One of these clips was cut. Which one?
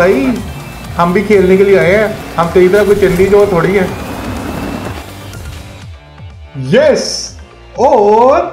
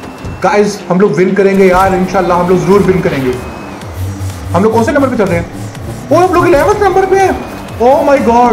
first; 1 cut; at 2.2 s

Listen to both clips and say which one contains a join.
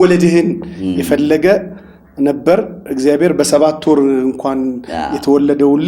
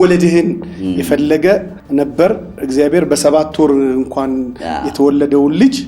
second; 1 cut; at 1.8 s

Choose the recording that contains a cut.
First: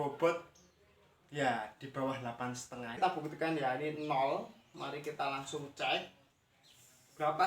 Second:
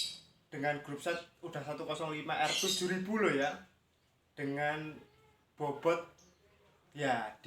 first; 1 cut; at 3.0 s

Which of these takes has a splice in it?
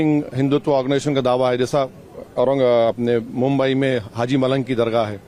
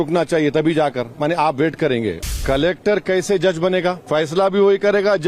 second; 2 cuts; at 2.4 s, 4.0 s

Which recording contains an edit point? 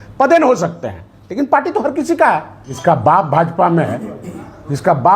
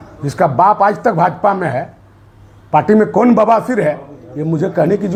first; 1 cut; at 2.7 s

